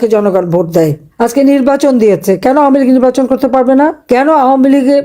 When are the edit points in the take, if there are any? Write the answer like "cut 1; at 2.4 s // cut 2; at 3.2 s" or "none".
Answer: cut 1; at 1.0 s // cut 2; at 4.0 s